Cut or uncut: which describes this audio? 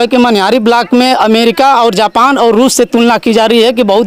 uncut